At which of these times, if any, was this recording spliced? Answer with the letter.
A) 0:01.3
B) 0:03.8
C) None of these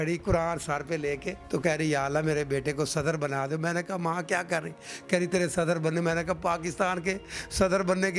A